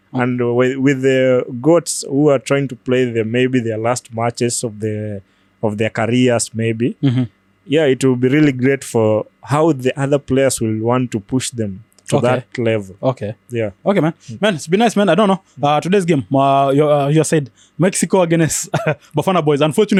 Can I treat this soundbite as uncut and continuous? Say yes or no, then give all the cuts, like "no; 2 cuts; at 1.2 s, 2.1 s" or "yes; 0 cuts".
yes; 0 cuts